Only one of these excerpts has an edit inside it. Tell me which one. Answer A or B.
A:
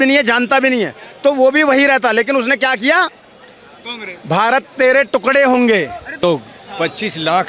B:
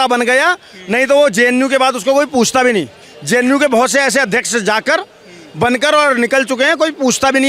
A